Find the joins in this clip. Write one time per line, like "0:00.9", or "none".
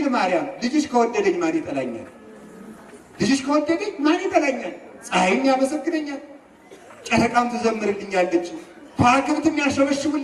none